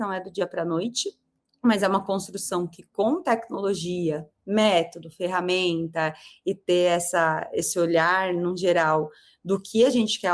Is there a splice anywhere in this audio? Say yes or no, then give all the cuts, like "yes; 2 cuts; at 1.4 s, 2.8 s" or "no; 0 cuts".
no; 0 cuts